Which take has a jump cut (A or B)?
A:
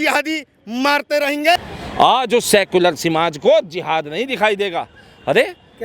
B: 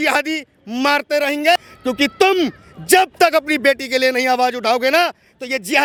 A